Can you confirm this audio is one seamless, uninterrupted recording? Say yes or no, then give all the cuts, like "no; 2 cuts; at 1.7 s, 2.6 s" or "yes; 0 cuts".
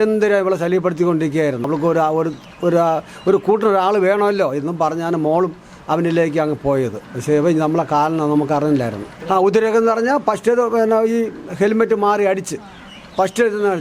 no; 2 cuts; at 1.7 s, 9.1 s